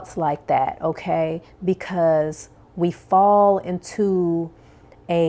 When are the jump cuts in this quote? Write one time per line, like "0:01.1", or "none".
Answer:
none